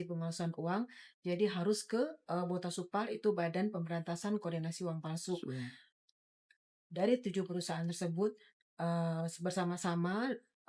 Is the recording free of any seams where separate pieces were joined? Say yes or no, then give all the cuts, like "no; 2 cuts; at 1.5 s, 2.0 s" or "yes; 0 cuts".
yes; 0 cuts